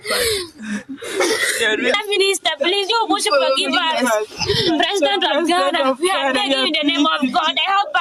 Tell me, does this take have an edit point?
no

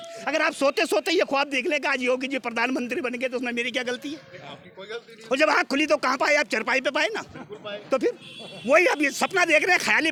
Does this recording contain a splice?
no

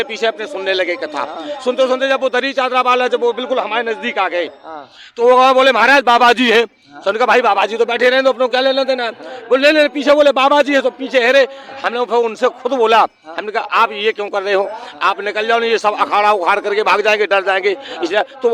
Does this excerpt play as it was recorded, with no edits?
yes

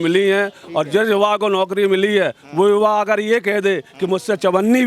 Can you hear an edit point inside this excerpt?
no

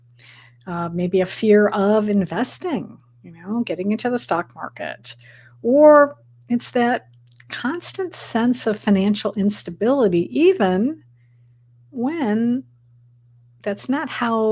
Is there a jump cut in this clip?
no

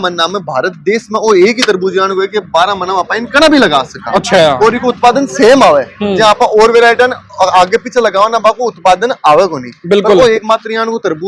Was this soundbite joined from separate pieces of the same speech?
no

